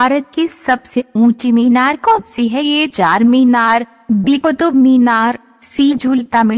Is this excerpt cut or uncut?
uncut